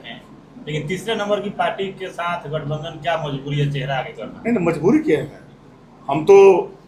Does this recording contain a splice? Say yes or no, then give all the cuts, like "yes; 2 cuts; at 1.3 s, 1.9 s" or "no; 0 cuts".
no; 0 cuts